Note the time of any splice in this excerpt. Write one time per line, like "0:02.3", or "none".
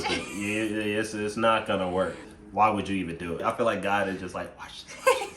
0:02.2
0:03.4